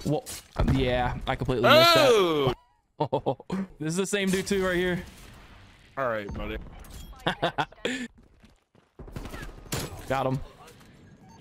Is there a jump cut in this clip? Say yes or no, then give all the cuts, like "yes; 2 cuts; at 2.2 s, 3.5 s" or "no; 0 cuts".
yes; 2 cuts; at 3.7 s, 8.1 s